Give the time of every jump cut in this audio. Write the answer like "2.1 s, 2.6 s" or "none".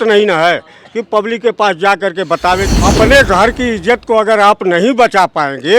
2.7 s